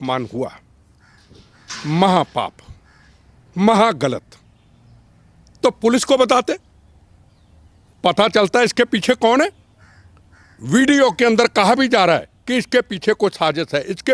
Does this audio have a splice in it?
no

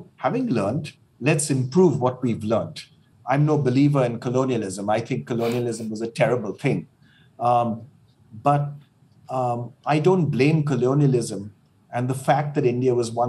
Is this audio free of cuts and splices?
no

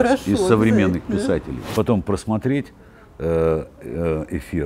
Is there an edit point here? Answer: yes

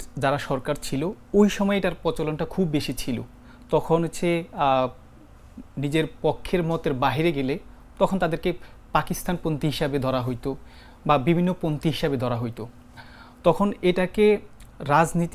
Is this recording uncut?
yes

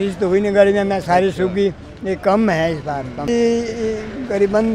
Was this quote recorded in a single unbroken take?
no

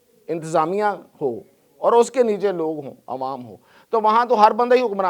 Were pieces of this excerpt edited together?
no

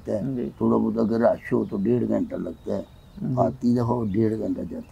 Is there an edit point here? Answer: no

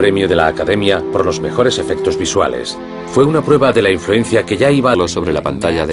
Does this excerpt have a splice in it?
no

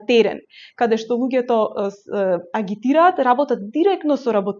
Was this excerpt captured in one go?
yes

